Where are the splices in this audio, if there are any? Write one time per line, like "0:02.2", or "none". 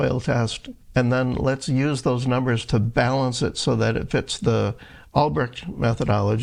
none